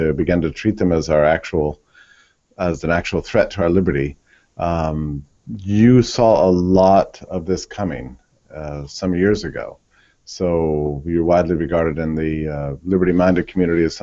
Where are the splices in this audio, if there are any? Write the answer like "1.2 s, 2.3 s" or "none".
12.3 s